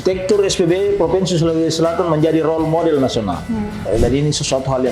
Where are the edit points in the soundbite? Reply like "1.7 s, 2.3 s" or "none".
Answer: 3.9 s